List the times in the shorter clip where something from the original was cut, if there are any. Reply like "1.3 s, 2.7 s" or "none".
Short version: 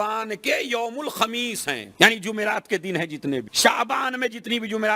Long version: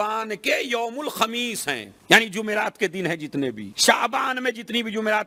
1.9 s, 3.5 s